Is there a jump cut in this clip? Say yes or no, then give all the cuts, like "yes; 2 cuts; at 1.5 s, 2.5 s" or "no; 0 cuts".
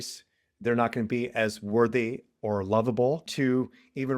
yes; 1 cut; at 3.3 s